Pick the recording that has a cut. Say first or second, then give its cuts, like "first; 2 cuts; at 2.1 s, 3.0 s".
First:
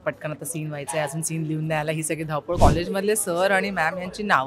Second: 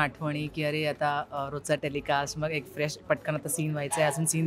first; 1 cut; at 2.6 s